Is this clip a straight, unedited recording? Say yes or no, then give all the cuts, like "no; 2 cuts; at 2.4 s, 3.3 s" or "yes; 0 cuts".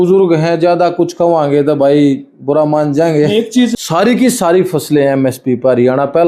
no; 1 cut; at 3.8 s